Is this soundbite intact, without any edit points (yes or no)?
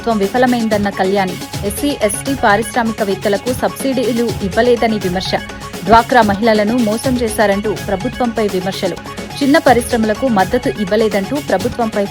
yes